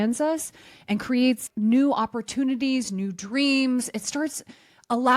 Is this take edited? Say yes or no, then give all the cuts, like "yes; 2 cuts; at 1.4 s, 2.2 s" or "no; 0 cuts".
yes; 1 cut; at 1.4 s